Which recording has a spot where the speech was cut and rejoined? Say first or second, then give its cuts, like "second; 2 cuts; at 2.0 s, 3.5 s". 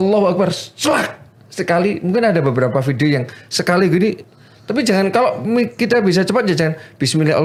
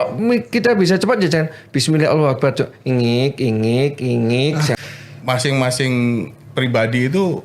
second; 1 cut; at 4.7 s